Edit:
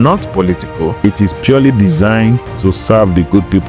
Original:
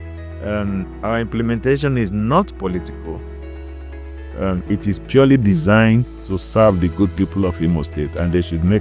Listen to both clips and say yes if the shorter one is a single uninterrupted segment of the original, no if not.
no